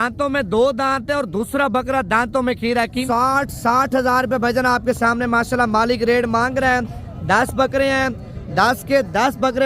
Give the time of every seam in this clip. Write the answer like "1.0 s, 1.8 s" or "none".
3.0 s